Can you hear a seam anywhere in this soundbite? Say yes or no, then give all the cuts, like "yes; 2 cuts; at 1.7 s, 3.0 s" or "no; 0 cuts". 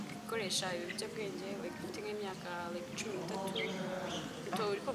no; 0 cuts